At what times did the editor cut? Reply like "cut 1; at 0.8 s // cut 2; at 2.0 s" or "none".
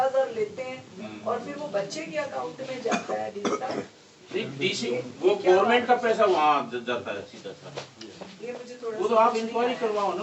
none